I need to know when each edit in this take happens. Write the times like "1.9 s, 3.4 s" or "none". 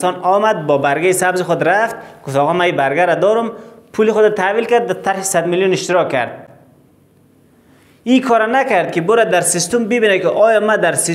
none